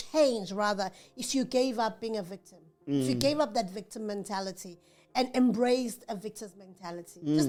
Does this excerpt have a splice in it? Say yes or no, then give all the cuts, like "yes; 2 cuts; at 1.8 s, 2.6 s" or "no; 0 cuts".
no; 0 cuts